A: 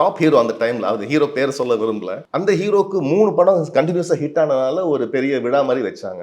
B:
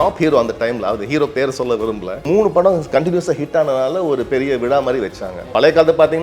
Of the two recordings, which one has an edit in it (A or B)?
B